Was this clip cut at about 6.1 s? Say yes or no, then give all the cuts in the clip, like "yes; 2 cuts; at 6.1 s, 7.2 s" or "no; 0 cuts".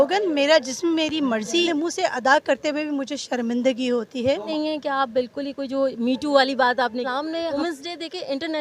no; 3 cuts; at 1.7 s, 4.5 s, 7.6 s